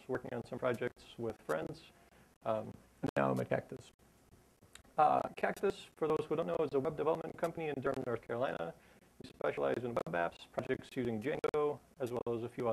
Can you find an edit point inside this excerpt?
yes; 1 cut; at 8.8 s

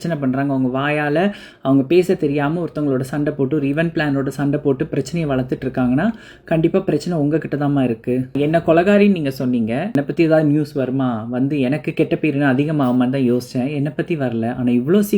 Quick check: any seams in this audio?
yes; 2 cuts; at 8.3 s, 10.0 s

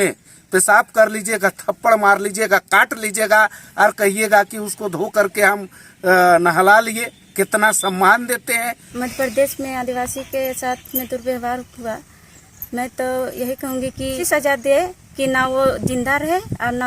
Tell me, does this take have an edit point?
yes; 2 cuts; at 8.8 s, 14.2 s

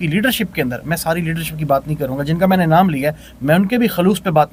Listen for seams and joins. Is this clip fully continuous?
yes; 0 cuts

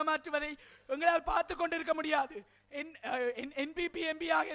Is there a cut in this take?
no; 0 cuts

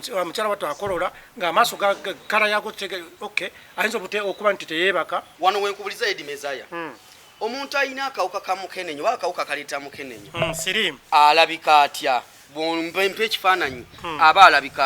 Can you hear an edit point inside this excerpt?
yes; 1 cut; at 5.3 s

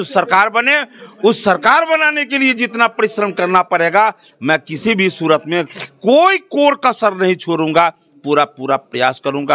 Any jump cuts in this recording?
no; 0 cuts

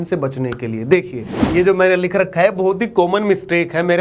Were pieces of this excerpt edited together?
yes; 1 cut; at 1.5 s

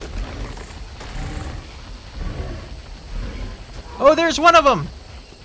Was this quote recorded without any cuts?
no; 1 cut; at 4.0 s

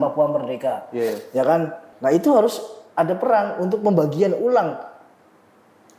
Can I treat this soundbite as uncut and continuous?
no; 1 cut; at 1.8 s

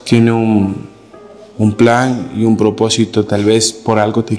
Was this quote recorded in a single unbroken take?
yes; 0 cuts

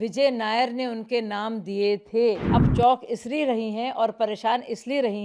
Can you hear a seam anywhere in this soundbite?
yes; 1 cut; at 2.4 s

